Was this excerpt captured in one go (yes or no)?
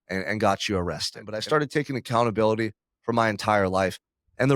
no